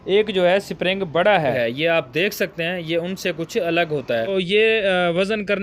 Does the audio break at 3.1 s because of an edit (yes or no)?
no